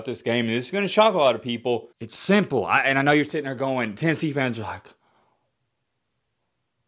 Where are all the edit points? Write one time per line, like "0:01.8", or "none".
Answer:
0:01.9